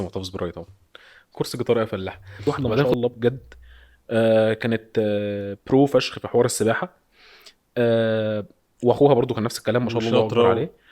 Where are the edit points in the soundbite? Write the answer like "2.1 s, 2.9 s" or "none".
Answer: 2.7 s